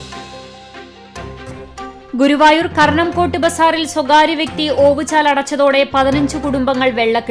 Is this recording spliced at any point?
yes; 1 cut; at 1.6 s

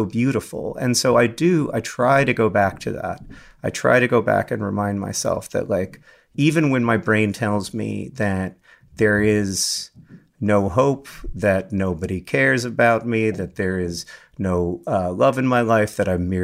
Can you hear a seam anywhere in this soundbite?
no; 0 cuts

